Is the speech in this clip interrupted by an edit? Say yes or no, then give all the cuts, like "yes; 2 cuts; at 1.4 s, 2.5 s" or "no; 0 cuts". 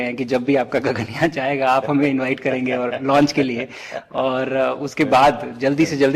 no; 0 cuts